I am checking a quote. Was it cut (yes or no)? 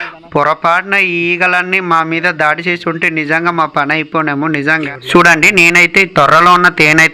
yes